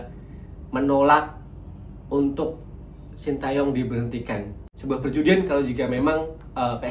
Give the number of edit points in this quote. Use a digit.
1